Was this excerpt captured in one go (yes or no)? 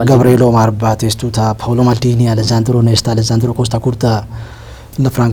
yes